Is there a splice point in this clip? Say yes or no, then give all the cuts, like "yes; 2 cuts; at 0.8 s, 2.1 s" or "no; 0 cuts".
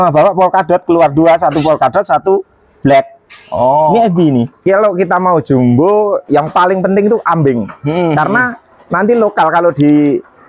yes; 2 cuts; at 4.5 s, 6.2 s